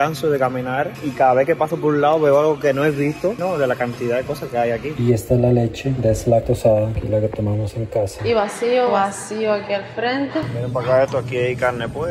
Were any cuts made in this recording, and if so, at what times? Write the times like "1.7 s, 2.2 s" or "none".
1.0 s, 3.4 s, 4.9 s, 8.2 s, 10.4 s